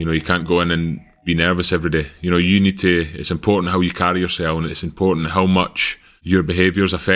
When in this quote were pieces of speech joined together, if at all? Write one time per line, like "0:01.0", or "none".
none